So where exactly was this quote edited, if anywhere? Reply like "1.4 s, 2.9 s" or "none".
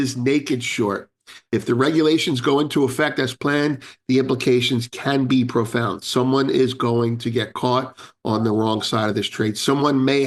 none